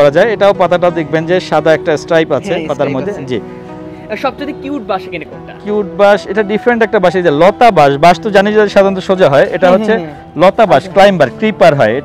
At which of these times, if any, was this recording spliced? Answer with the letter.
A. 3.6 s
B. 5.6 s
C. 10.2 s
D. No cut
D